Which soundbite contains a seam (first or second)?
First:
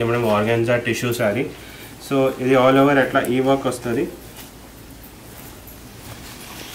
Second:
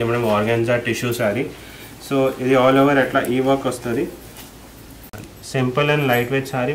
second